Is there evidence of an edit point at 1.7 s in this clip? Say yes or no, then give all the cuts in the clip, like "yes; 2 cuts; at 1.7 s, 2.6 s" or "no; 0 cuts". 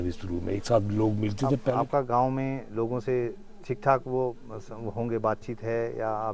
yes; 1 cut; at 1.7 s